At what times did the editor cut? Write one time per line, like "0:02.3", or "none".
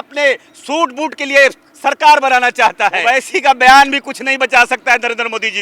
0:03.0